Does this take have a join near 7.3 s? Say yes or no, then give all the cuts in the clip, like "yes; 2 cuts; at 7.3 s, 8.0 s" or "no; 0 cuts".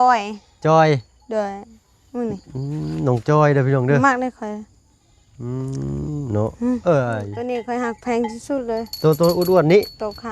yes; 1 cut; at 7.3 s